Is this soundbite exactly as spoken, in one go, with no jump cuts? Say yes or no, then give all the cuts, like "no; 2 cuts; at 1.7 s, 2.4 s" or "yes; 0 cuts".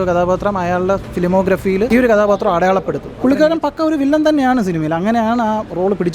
no; 2 cuts; at 1.9 s, 3.0 s